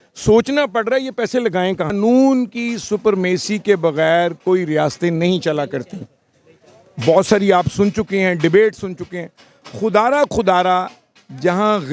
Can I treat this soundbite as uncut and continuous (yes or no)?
no